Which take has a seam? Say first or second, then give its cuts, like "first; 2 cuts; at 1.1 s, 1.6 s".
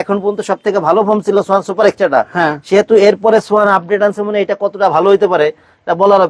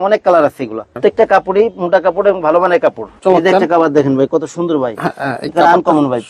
second; 2 cuts; at 1.0 s, 3.1 s